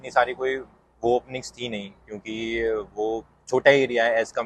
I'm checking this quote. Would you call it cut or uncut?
uncut